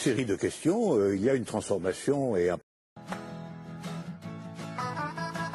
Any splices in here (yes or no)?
no